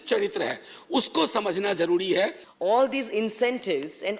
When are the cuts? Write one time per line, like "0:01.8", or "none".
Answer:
0:02.5